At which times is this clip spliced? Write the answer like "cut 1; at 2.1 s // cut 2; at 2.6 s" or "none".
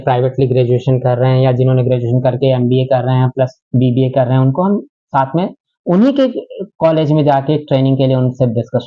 none